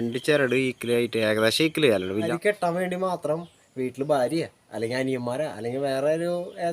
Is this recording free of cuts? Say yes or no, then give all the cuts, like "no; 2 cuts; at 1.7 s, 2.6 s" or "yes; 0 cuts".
no; 1 cut; at 2.3 s